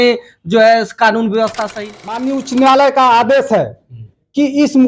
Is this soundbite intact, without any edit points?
no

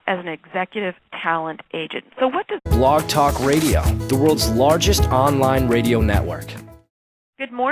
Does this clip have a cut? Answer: no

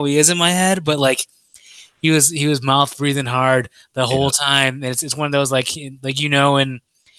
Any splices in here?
no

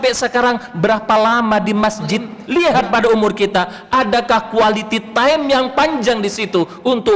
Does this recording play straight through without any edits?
no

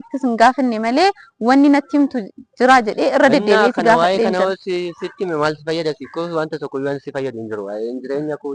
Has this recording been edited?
no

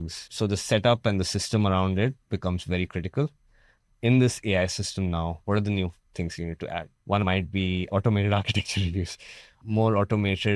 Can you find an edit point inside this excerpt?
yes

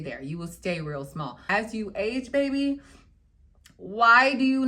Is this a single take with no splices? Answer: no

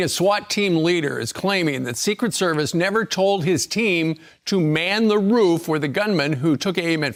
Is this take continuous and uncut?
yes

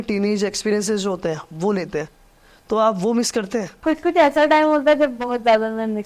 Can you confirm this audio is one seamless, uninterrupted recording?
yes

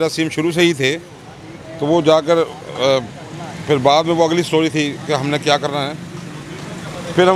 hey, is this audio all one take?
yes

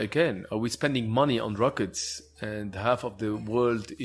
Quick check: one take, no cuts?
yes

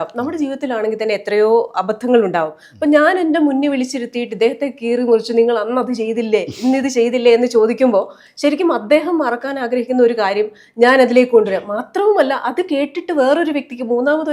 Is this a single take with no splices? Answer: yes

